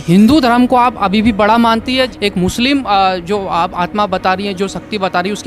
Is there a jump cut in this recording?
yes; 1 cut; at 2.1 s

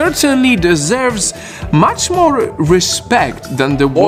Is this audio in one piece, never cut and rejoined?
yes; 0 cuts

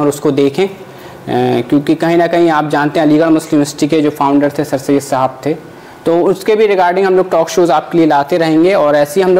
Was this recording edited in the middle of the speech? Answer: no; 0 cuts

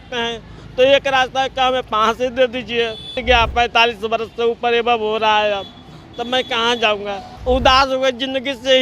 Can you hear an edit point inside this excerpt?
yes; 2 cuts; at 3.1 s, 7.3 s

